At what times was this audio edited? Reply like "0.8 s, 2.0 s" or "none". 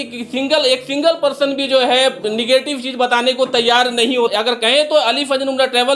4.3 s